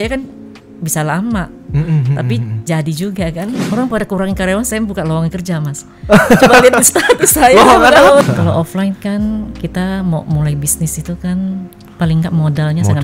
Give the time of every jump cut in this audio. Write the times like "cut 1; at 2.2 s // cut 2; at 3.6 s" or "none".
cut 1; at 3.6 s // cut 2; at 8.2 s